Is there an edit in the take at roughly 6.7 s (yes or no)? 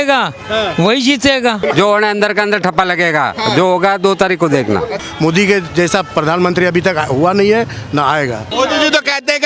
no